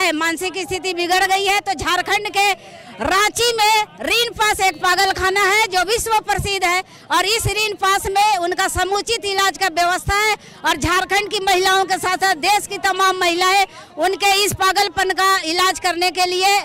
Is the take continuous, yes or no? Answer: yes